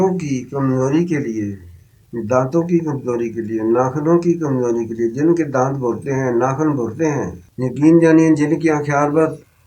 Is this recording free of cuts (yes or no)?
no